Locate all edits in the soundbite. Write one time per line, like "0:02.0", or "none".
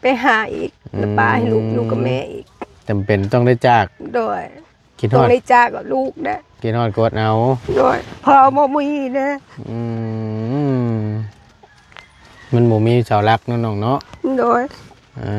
none